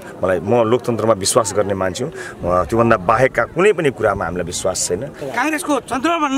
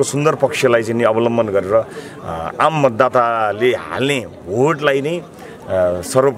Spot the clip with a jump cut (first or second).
first